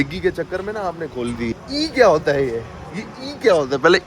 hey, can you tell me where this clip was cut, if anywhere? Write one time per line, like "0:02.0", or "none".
0:01.5